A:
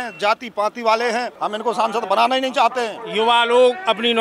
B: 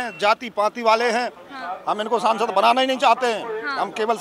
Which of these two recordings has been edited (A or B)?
A